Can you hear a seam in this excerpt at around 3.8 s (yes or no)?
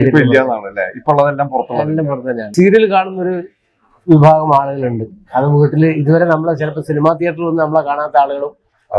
no